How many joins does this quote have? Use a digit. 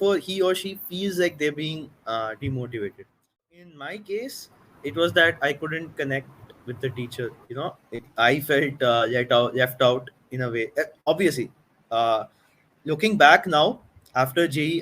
1